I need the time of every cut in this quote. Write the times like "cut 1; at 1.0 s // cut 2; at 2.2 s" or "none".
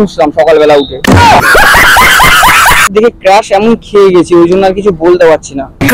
cut 1; at 0.9 s // cut 2; at 2.9 s